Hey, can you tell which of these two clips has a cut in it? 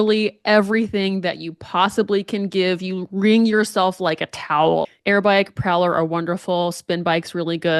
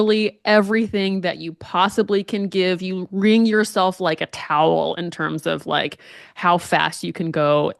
first; 1 cut; at 4.9 s

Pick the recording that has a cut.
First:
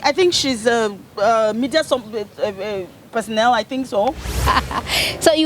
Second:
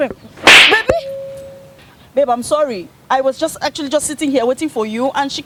first; 1 cut; at 4.4 s

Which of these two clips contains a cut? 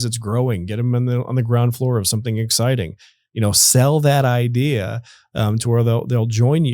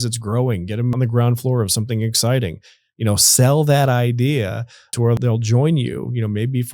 second; 2 cuts; at 0.9 s, 5.1 s

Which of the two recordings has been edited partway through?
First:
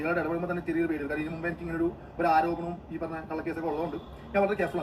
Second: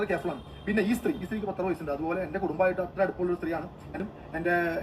second; 1 cut; at 3.9 s

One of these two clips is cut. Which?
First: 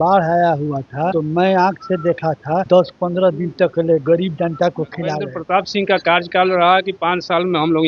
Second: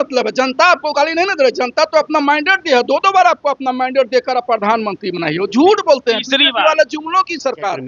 first; 3 cuts; at 1.1 s, 2.7 s, 5.3 s

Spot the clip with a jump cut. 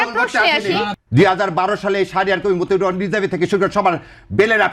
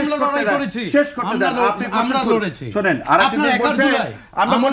first; 1 cut; at 0.9 s

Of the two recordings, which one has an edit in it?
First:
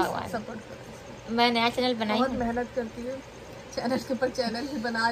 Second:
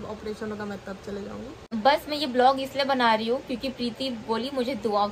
second; 1 cut; at 1.6 s

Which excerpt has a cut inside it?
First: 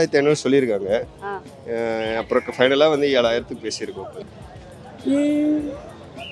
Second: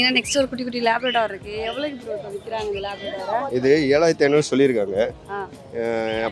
first; 1 cut; at 4.2 s

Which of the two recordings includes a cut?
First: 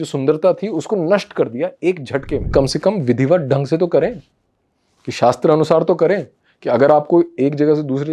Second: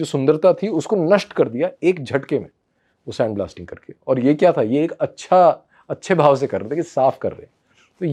first; 1 cut; at 2.5 s

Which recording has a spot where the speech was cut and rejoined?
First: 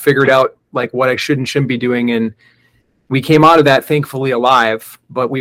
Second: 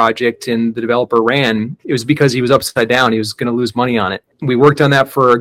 second; 2 cuts; at 1.8 s, 4.2 s

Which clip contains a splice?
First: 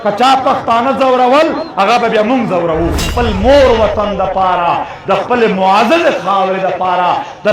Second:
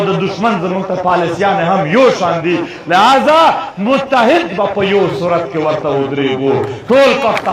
first; 1 cut; at 3.1 s

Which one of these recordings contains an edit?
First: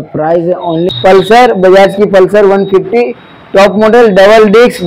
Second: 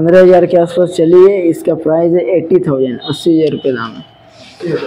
first; 1 cut; at 1.2 s

